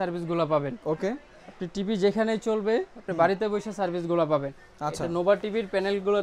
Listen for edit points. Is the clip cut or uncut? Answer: uncut